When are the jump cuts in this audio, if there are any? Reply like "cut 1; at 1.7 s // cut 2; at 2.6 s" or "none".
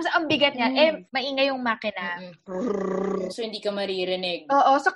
cut 1; at 1.0 s

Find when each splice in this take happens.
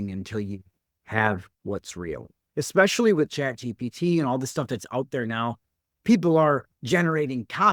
cut 1; at 2.4 s

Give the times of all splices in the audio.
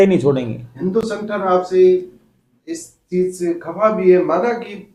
none

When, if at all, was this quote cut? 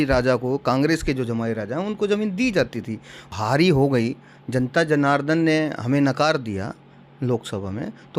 cut 1; at 3.3 s

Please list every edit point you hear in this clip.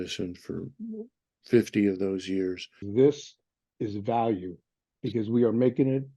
cut 1; at 2.8 s

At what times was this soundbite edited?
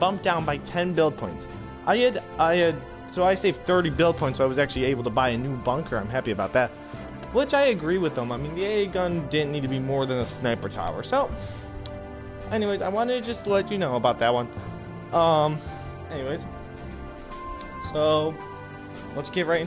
cut 1; at 2.2 s

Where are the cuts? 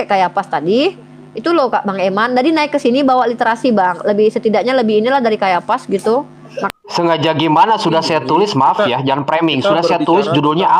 cut 1; at 6.7 s

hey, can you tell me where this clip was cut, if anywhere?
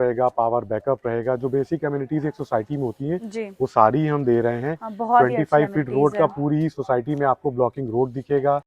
none

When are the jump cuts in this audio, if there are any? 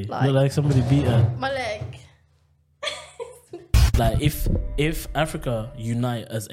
cut 1; at 3.8 s

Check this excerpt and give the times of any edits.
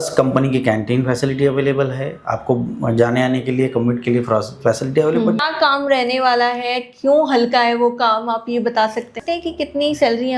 cut 1; at 5.4 s // cut 2; at 9.2 s

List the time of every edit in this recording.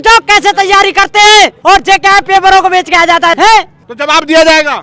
cut 1; at 1.6 s // cut 2; at 3.4 s

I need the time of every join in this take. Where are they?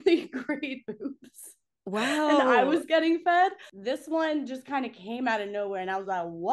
cut 1; at 3.7 s

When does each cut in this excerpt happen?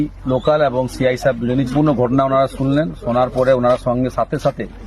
cut 1; at 1.7 s

